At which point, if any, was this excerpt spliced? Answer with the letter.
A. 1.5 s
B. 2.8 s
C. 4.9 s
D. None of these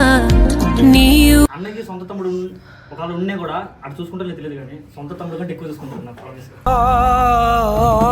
A